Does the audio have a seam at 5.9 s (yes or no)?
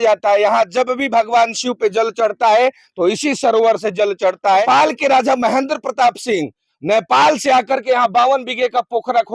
no